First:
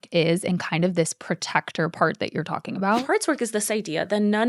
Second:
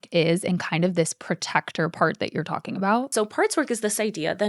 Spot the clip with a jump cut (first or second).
first